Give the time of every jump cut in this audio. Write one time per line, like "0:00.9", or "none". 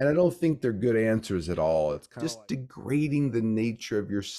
0:02.1